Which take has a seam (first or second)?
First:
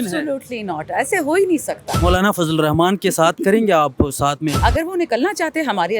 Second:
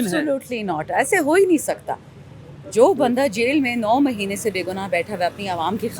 first